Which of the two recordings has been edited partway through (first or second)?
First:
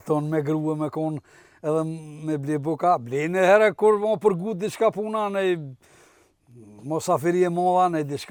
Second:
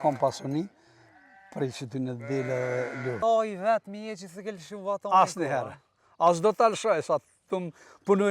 second